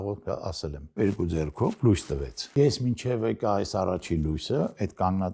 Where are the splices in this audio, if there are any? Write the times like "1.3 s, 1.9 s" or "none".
1.0 s, 2.4 s